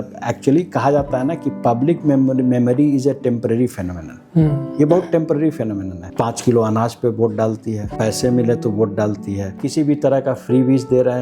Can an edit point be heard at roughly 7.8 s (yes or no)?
yes